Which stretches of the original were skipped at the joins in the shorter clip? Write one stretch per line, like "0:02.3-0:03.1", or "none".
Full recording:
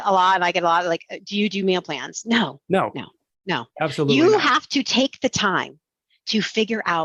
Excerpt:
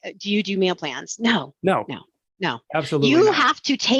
none